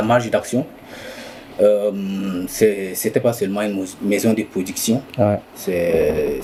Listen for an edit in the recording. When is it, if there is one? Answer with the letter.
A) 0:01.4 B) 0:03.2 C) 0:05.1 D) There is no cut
D